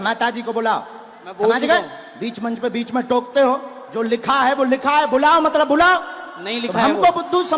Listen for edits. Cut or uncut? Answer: uncut